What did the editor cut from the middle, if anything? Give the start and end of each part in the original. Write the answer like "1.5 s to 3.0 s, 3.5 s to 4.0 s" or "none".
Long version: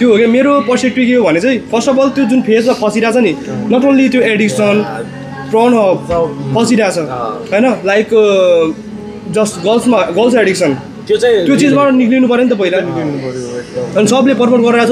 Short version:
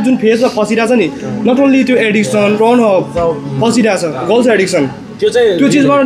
4.8 s to 5.5 s, 7.2 s to 10.1 s